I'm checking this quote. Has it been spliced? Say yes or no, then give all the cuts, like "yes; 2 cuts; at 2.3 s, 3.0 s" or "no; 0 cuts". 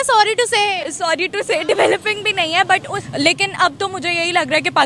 yes; 1 cut; at 3.0 s